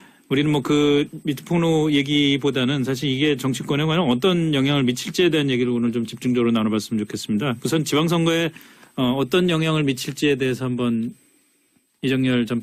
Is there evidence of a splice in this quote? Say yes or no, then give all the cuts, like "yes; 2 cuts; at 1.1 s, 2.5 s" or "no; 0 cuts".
no; 0 cuts